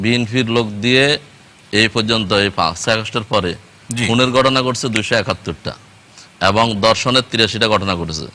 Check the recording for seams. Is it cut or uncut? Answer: uncut